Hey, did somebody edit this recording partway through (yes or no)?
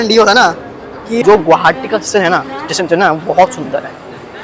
yes